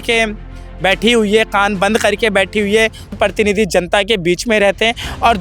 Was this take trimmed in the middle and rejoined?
yes; 1 cut; at 3.1 s

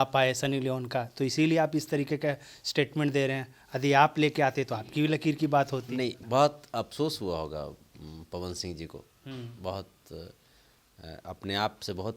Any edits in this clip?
yes; 1 cut; at 6.2 s

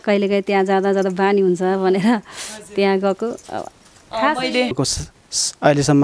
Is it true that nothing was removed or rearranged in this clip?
no; 1 cut; at 4.8 s

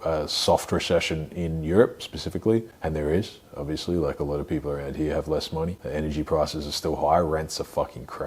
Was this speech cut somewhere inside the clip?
yes; 2 cuts; at 2.7 s, 5.8 s

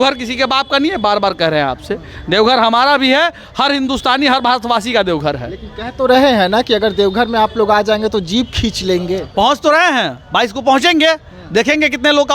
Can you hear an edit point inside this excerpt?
no; 0 cuts

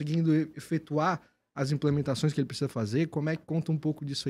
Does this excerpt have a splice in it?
no; 0 cuts

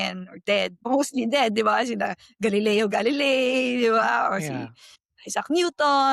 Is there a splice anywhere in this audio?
no; 0 cuts

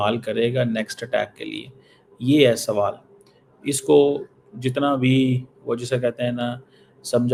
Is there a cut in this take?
no; 0 cuts

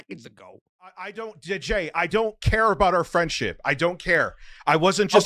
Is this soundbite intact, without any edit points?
no; 1 cut; at 1.1 s

